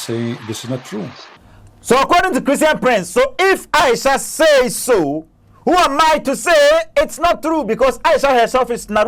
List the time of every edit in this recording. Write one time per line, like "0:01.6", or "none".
none